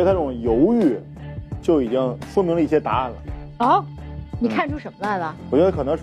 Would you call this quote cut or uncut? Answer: uncut